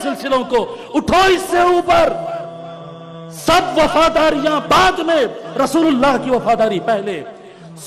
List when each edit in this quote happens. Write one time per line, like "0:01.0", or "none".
none